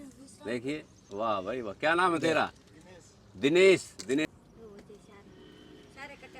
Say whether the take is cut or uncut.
cut